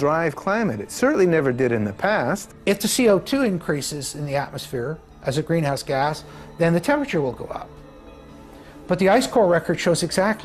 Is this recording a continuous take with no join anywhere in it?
no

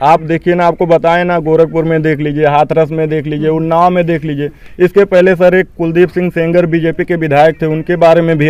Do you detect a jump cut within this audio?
no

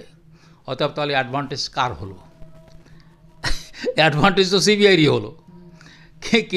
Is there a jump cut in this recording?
no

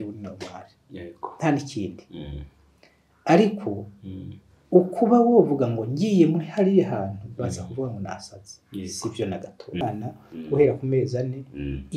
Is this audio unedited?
no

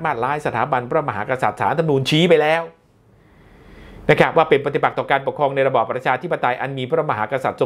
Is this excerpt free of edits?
yes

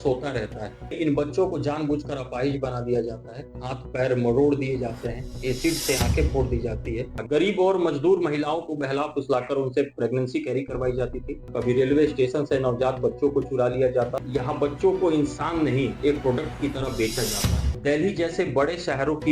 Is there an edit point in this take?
yes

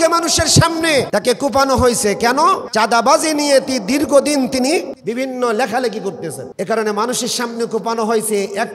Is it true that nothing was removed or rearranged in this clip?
no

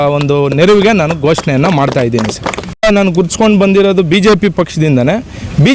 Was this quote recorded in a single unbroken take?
no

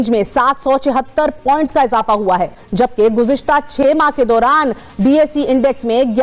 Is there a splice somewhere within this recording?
no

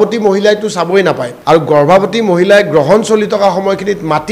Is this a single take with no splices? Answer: no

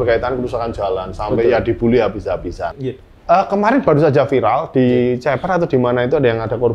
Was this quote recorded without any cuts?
no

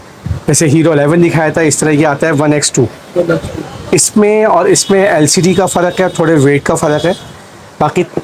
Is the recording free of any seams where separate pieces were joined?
yes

